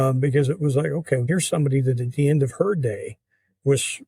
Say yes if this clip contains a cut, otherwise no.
yes